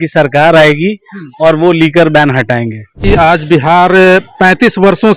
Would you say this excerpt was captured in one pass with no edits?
no; 1 cut; at 3.0 s

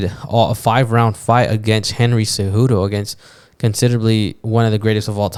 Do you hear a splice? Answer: no; 0 cuts

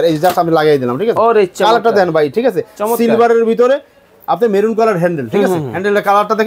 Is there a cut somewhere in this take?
no; 0 cuts

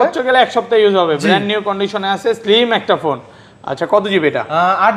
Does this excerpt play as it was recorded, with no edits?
yes; 0 cuts

